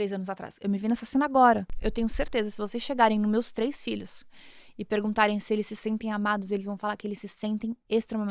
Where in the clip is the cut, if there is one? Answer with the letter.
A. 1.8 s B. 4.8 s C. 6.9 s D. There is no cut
A